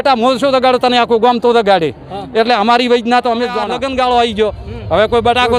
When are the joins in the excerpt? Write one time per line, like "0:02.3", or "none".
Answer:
0:03.7